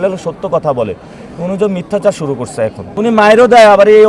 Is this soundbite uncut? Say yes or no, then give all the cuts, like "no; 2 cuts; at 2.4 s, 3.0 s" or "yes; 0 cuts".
no; 1 cut; at 2.8 s